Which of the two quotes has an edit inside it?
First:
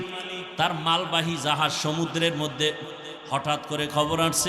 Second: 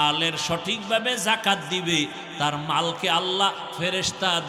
first; 1 cut; at 2.8 s

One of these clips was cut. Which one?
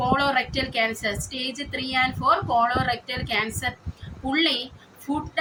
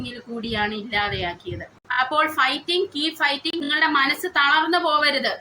second; 2 cuts; at 1.7 s, 3.6 s

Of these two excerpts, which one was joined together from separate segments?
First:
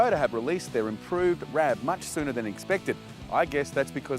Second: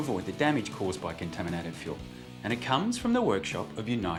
first; 1 cut; at 1.5 s

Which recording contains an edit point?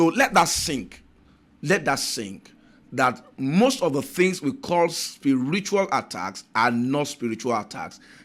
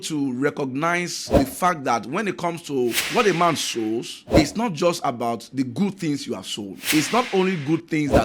second; 3 cuts; at 1.2 s, 3.0 s, 4.2 s

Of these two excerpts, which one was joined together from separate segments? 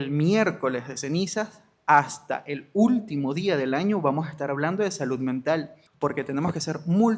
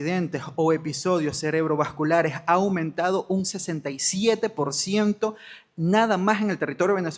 first; 1 cut; at 5.8 s

